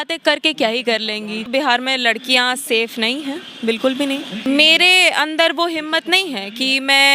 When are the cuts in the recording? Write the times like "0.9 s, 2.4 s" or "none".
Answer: 1.5 s, 4.4 s